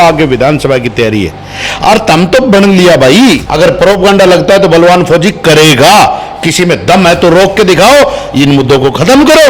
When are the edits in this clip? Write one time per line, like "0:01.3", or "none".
0:03.5